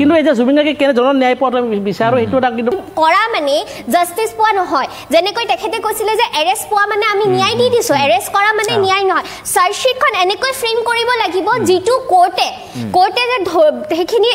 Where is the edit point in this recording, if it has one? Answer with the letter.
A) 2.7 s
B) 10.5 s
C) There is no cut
A